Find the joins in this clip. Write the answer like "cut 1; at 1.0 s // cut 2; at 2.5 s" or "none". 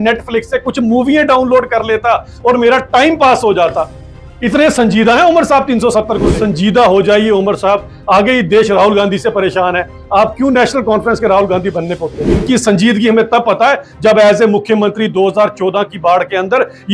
cut 1; at 6.3 s // cut 2; at 12.4 s